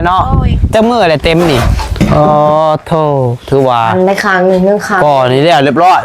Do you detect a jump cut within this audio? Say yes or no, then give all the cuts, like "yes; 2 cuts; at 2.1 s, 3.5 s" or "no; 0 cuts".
yes; 1 cut; at 1.8 s